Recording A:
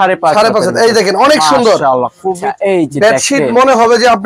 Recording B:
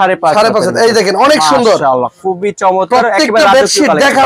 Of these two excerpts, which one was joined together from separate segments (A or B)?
A